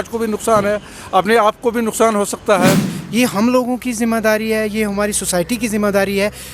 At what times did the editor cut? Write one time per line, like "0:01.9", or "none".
0:02.9